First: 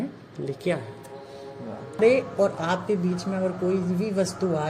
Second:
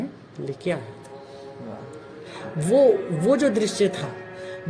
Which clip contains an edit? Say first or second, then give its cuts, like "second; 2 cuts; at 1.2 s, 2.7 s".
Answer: first; 1 cut; at 2.0 s